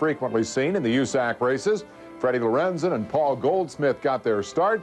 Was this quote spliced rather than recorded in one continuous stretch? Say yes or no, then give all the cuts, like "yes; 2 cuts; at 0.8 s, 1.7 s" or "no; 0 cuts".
no; 0 cuts